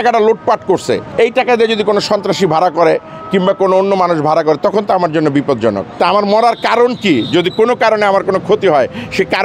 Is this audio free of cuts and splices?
no; 2 cuts; at 1.1 s, 6.0 s

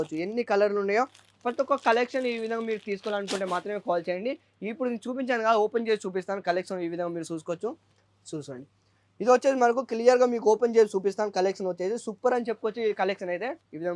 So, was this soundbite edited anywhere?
no; 0 cuts

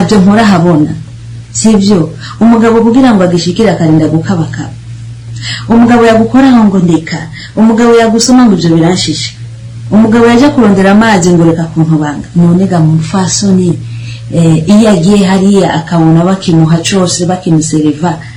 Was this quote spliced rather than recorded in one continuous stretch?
no; 0 cuts

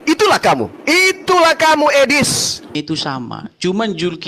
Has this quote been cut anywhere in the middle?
yes; 1 cut; at 2.8 s

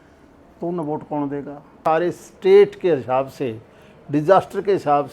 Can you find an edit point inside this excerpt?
yes; 1 cut; at 1.8 s

